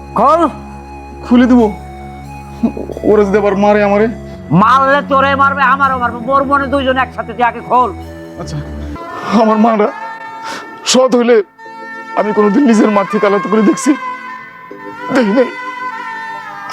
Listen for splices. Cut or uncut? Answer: cut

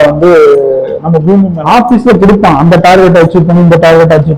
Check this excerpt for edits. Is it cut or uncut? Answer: cut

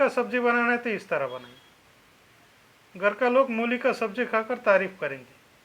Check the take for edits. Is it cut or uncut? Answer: uncut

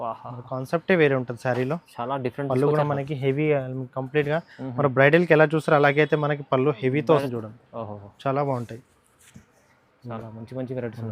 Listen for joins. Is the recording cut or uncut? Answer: cut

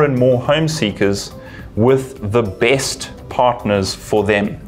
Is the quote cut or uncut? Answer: uncut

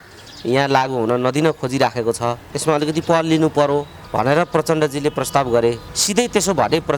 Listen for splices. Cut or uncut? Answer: cut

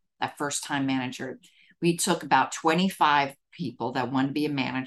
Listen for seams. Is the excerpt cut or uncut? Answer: uncut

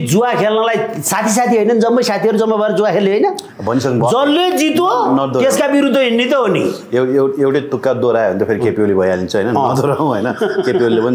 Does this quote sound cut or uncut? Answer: uncut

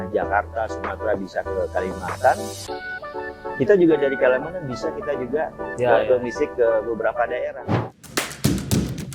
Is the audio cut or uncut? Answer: cut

